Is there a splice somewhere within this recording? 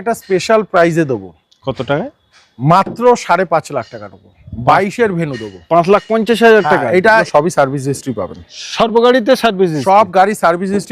yes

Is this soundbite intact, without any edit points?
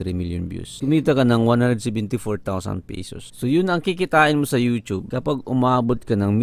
yes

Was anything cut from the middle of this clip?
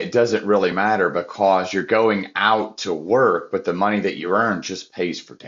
no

